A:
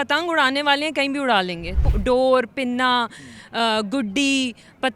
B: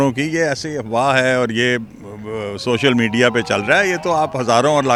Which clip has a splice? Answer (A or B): A